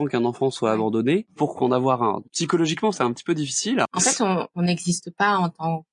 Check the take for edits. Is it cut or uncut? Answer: cut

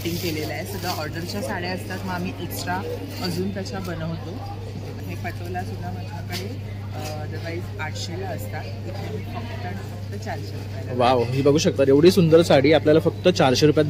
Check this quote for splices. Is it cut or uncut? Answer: cut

